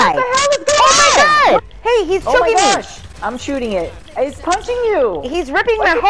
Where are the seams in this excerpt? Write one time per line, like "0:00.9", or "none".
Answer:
0:01.6
0:03.1
0:04.0